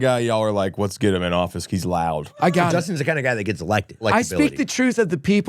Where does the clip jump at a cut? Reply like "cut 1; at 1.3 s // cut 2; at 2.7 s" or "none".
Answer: cut 1; at 2.3 s // cut 2; at 4.0 s